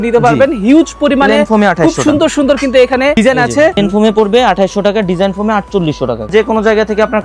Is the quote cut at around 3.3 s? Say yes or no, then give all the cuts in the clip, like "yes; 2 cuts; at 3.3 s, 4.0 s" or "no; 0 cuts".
yes; 2 cuts; at 3.3 s, 6.3 s